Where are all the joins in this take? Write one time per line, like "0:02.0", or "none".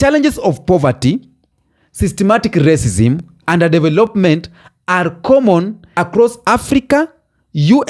0:06.0